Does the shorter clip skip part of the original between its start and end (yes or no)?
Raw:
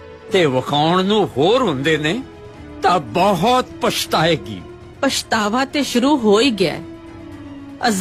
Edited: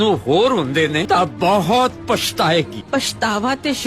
yes